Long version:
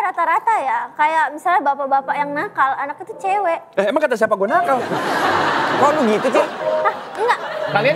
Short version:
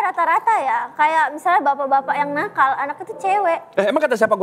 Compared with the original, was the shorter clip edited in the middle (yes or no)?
no